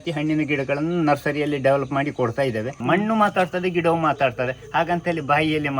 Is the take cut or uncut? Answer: cut